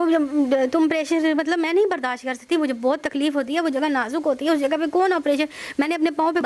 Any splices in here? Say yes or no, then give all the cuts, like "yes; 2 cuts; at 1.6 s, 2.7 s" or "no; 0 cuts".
no; 0 cuts